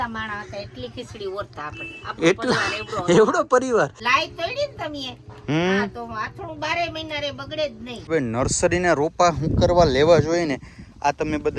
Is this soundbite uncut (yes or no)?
no